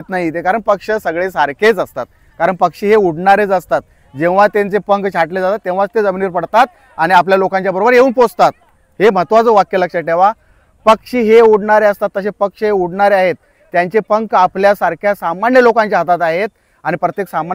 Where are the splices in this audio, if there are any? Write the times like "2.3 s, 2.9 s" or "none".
none

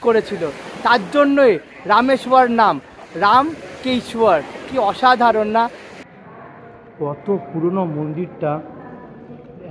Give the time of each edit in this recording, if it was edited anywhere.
5.9 s

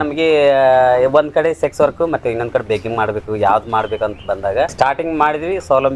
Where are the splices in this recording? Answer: 4.7 s

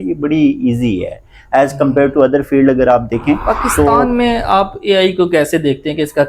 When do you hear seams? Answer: 4.0 s

